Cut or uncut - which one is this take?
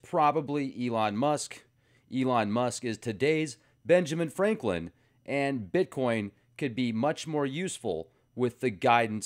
cut